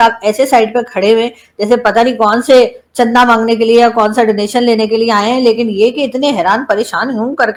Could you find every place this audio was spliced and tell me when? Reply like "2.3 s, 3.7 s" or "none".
none